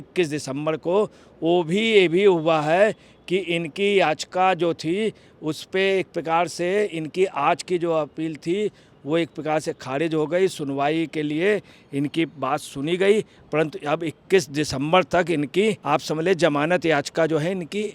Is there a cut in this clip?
yes; 1 cut; at 15.8 s

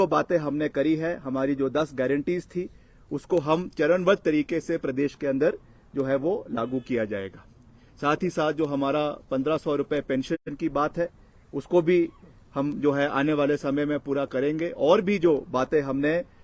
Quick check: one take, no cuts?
yes; 0 cuts

